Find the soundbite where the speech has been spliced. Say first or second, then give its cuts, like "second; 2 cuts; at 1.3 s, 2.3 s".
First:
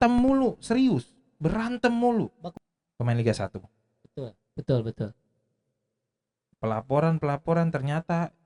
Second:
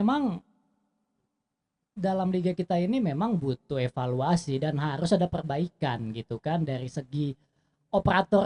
first; 1 cut; at 2.4 s